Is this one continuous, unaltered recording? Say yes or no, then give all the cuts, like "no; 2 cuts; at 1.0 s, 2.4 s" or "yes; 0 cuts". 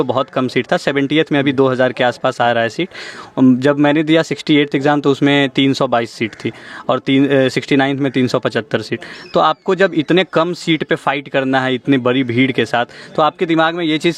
yes; 0 cuts